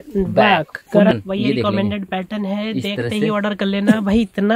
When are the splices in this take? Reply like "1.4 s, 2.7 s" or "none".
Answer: 1.1 s